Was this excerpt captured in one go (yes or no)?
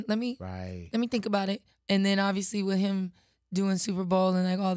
no